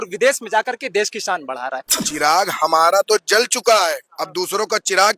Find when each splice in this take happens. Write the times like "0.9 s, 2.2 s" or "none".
1.8 s